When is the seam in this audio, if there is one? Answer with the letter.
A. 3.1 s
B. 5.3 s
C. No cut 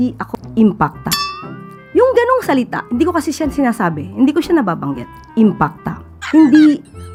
C